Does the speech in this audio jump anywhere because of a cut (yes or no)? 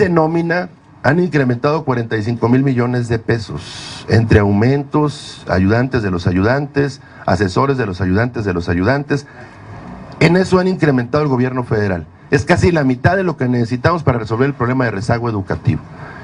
no